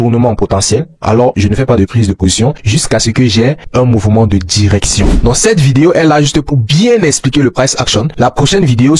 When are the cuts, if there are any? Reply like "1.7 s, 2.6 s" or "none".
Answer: 5.2 s